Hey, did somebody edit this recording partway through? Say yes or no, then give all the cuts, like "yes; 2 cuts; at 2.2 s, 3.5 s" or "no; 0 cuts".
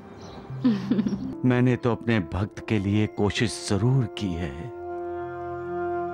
yes; 1 cut; at 1.3 s